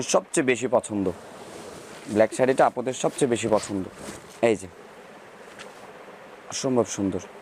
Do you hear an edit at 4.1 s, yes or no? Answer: no